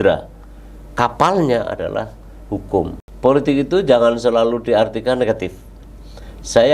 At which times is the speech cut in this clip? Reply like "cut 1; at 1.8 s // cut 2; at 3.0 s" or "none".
cut 1; at 3.0 s